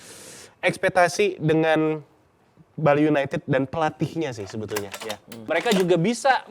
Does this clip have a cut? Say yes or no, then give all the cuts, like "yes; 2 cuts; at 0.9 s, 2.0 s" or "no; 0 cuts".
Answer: yes; 1 cut; at 5.4 s